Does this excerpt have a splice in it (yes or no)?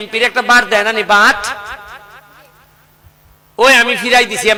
no